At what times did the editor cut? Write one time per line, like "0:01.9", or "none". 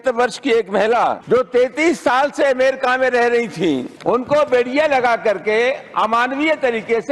0:01.2
0:03.9